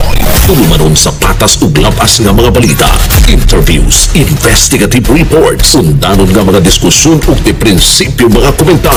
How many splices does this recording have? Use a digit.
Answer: 0